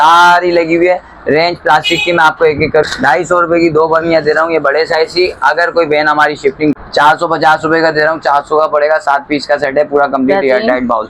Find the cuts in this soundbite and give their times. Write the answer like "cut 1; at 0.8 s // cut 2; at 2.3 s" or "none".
cut 1; at 2.8 s // cut 2; at 6.7 s